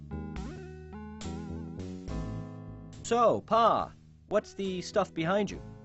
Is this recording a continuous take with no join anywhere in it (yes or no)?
no